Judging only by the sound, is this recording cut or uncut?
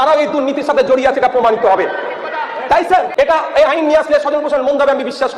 cut